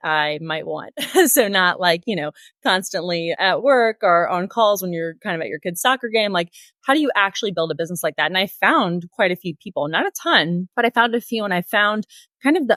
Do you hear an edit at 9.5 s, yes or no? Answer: no